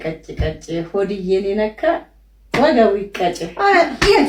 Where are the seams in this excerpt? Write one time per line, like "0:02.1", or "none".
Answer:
none